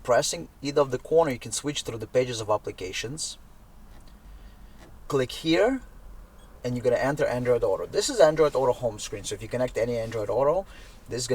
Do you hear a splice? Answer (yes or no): yes